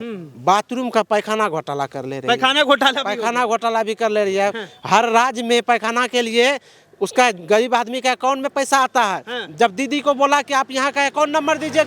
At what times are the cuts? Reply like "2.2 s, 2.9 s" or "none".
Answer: none